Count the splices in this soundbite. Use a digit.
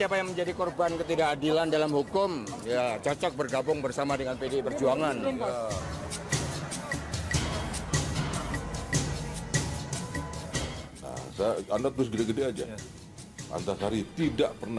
1